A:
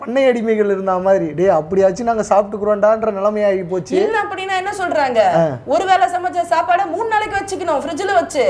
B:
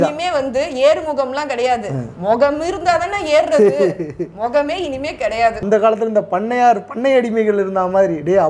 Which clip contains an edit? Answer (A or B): B